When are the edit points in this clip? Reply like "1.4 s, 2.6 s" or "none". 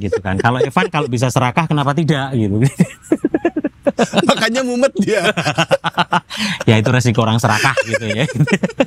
none